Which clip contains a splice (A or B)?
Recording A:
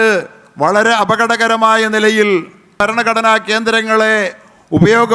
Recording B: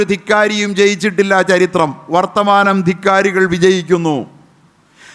A